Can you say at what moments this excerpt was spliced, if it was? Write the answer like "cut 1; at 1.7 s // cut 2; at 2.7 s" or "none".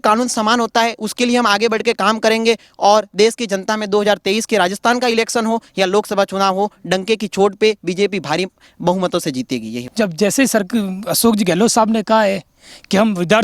cut 1; at 9.8 s